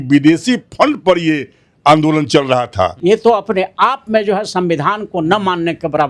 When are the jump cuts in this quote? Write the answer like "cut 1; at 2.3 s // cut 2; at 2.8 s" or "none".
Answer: cut 1; at 2.9 s